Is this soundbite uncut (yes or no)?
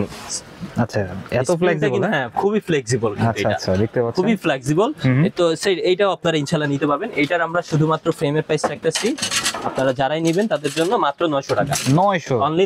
yes